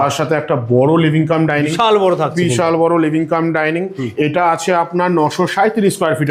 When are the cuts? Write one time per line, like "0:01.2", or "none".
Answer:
none

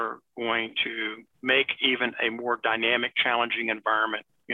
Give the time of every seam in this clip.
0:01.2

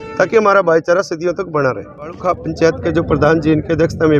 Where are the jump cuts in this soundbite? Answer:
0:02.2

